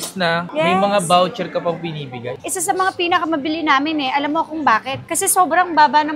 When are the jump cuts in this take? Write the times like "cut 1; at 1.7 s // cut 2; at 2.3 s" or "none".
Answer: cut 1; at 2.3 s

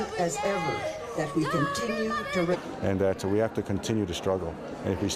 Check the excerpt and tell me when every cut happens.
none

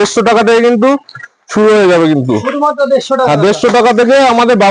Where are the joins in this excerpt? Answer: none

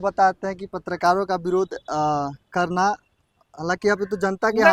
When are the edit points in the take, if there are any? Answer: none

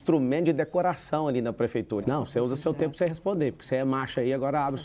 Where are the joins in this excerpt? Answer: cut 1; at 2.0 s

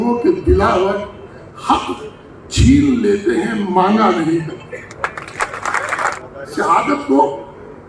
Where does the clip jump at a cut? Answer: cut 1; at 5.9 s

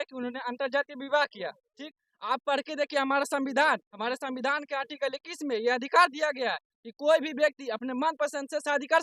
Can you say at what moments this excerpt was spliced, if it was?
none

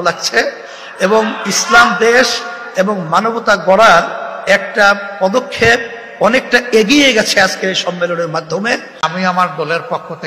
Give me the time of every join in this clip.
cut 1; at 9.0 s

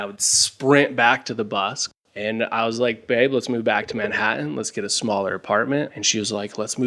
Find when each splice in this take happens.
cut 1; at 1.9 s // cut 2; at 6.0 s

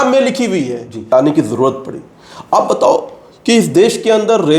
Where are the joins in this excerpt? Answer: cut 1; at 1.1 s

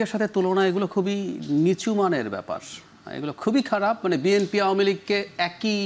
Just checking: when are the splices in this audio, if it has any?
none

